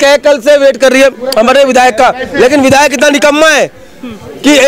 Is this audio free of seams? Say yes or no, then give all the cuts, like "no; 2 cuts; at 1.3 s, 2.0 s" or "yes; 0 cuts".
yes; 0 cuts